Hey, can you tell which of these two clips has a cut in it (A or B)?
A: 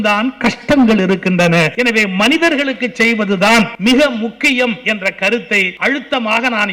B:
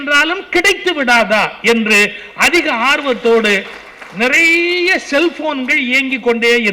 A